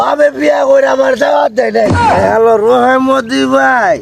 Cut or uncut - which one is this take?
cut